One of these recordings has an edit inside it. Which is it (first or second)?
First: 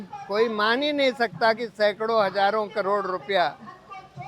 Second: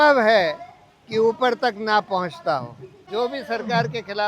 second